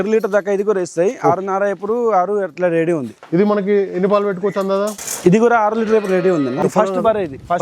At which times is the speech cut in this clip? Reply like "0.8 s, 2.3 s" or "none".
3.1 s, 5.0 s, 6.6 s